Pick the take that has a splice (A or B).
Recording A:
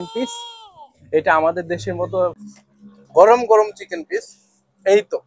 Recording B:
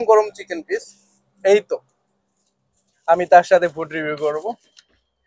A